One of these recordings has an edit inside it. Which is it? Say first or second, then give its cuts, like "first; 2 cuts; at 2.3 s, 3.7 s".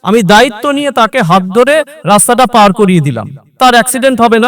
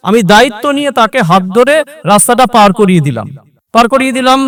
first; 1 cut; at 3.5 s